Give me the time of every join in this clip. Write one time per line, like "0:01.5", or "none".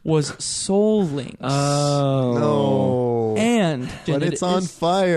0:04.0